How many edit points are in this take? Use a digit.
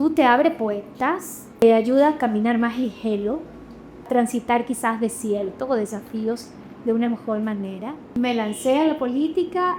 3